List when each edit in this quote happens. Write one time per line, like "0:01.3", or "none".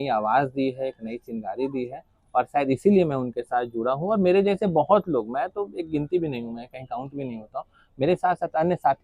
none